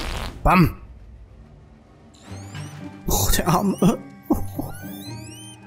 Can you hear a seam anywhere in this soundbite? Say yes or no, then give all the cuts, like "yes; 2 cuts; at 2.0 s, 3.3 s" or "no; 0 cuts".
no; 0 cuts